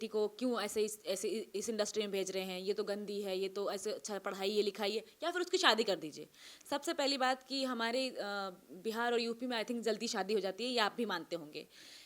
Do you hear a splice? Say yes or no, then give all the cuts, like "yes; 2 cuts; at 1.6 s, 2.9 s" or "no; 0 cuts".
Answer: no; 0 cuts